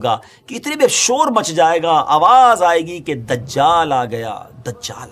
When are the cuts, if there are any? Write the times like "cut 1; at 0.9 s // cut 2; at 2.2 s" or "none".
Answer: none